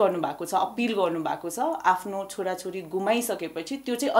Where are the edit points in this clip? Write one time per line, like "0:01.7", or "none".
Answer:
none